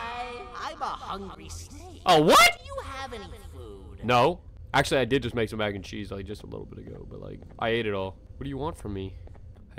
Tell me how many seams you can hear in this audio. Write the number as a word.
zero